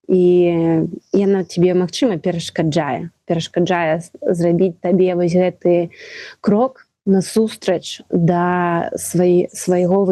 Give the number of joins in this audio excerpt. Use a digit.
1